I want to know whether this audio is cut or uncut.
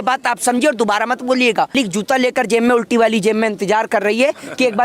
cut